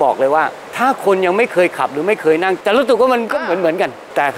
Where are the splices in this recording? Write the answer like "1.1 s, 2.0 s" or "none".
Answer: 2.6 s